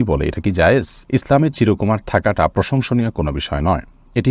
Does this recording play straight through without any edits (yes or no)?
yes